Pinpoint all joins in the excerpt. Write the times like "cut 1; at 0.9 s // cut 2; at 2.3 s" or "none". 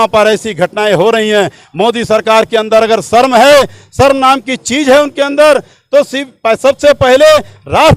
none